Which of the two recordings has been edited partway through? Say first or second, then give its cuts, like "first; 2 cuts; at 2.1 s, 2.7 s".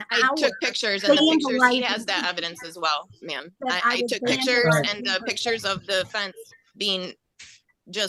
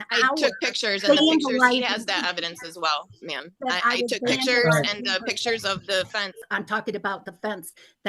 second; 1 cut; at 6.4 s